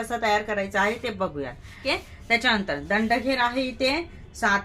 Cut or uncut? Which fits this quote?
cut